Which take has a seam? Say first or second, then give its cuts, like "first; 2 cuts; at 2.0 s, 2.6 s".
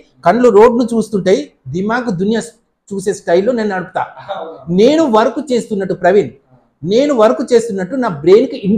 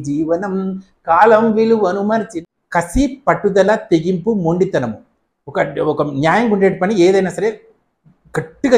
second; 1 cut; at 2.4 s